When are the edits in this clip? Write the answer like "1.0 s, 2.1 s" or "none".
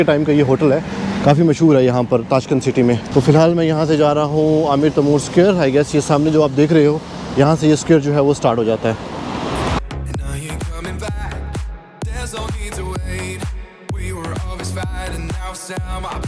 none

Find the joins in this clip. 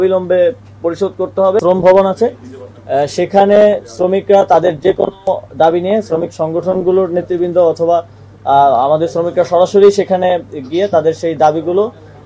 1.6 s

